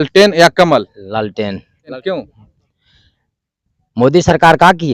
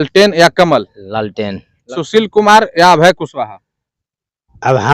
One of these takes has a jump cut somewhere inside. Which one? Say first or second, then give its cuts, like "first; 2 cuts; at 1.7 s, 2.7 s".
second; 1 cut; at 2.0 s